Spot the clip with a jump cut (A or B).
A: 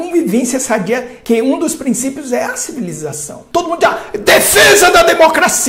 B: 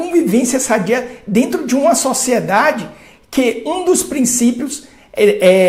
A